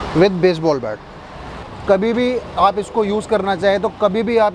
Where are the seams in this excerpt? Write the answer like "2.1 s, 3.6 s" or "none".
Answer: none